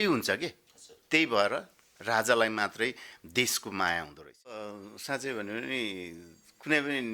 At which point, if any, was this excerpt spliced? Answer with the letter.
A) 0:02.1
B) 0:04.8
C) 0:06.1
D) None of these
B